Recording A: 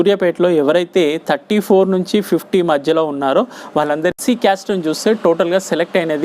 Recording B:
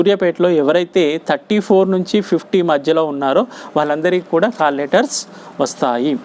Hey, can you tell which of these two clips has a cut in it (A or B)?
A